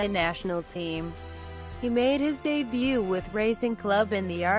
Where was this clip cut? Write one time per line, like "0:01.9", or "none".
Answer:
0:02.6

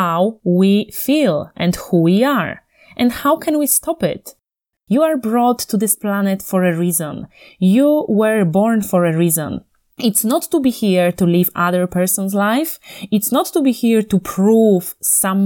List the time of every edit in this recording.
0:04.6

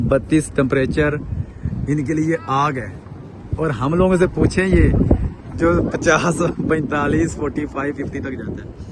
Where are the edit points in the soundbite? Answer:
none

